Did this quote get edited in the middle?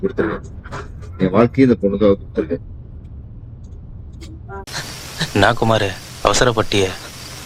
yes; 1 cut; at 4.7 s

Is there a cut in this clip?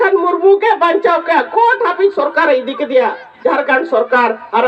no; 0 cuts

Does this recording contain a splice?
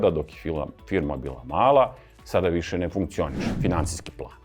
yes; 1 cut; at 3.5 s

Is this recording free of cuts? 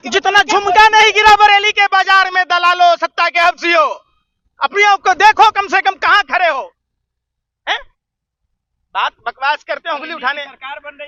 yes; 0 cuts

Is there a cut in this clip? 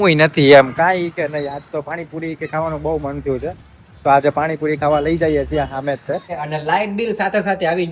yes; 1 cut; at 6.3 s

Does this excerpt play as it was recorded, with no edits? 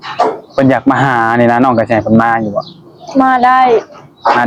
yes; 0 cuts

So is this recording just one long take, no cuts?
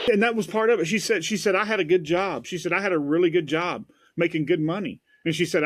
yes; 0 cuts

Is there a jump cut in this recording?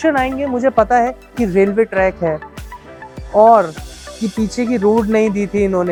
no; 0 cuts

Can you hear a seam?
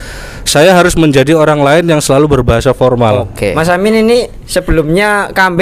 yes; 1 cut; at 3.5 s

